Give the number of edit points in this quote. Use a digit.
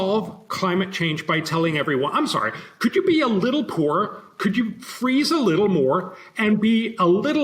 0